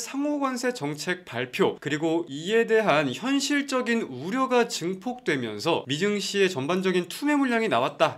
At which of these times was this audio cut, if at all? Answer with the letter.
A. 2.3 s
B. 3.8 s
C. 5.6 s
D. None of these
D